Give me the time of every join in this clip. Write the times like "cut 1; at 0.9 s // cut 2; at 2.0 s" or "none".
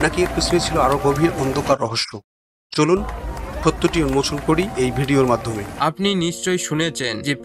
cut 1; at 5.7 s